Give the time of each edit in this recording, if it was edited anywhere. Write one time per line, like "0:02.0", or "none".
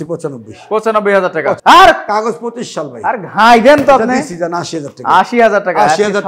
0:01.6